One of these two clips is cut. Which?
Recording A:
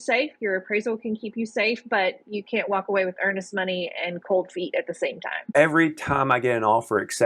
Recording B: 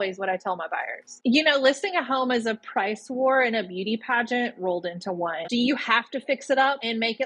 B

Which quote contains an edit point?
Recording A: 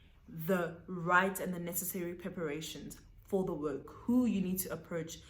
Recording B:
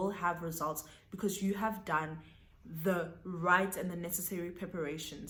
A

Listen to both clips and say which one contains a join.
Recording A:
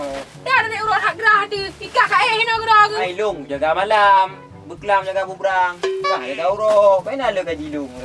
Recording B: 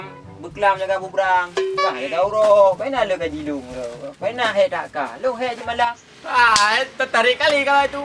B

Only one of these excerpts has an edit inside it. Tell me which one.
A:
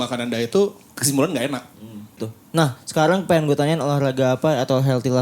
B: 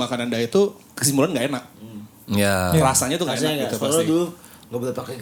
A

